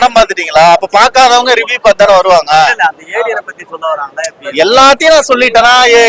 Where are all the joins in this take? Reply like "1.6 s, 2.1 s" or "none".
none